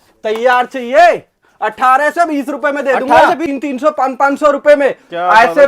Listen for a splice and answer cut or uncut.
cut